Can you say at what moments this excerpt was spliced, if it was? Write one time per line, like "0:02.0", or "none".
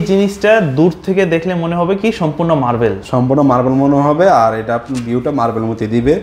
none